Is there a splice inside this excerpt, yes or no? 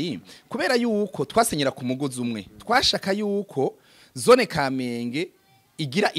no